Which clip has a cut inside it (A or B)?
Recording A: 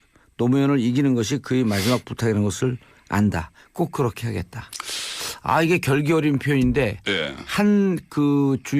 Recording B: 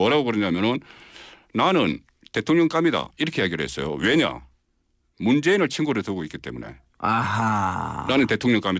B